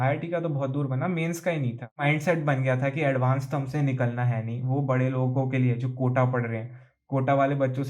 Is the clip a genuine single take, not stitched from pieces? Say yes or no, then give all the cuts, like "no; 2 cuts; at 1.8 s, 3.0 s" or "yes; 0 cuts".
no; 1 cut; at 2.0 s